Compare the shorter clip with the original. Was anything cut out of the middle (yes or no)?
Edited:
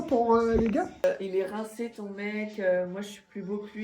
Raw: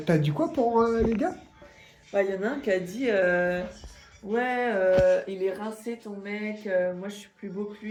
yes